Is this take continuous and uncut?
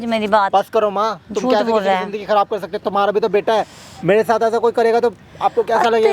yes; 0 cuts

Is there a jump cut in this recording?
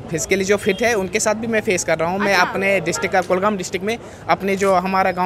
no; 0 cuts

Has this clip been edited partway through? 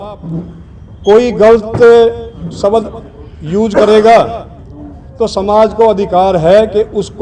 no; 0 cuts

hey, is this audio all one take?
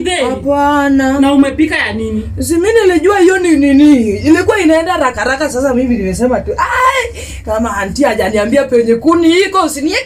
yes; 0 cuts

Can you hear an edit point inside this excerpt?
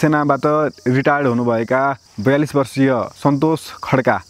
no; 0 cuts

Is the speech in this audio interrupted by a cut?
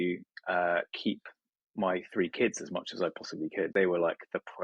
yes; 1 cut; at 3.7 s

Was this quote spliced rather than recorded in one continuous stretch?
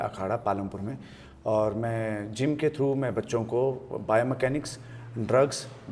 no; 0 cuts

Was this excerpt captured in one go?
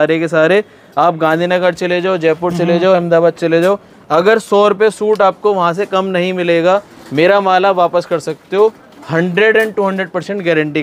yes; 0 cuts

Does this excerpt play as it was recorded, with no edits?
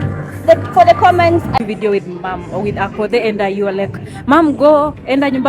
no; 1 cut; at 1.5 s

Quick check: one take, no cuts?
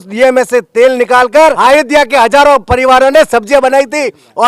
no; 1 cut; at 1.6 s

